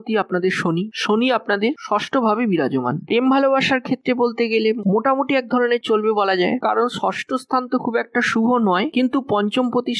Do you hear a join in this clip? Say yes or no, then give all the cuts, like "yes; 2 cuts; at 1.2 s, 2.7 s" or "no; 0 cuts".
no; 0 cuts